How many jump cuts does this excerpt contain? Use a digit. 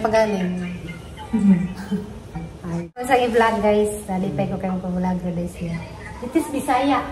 1